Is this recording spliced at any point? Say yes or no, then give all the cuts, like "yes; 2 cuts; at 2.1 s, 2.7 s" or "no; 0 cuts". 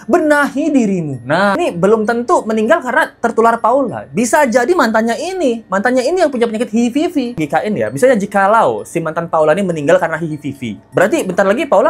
yes; 2 cuts; at 1.6 s, 7.4 s